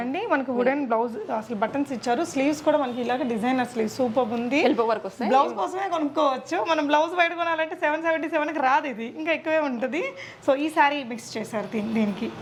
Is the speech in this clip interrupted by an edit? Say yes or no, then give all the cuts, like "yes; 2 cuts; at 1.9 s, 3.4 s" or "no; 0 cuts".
no; 0 cuts